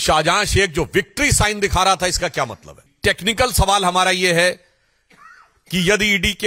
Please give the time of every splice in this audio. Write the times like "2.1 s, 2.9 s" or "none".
2.9 s